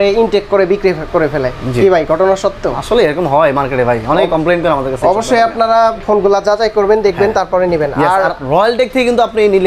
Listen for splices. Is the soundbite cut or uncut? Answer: uncut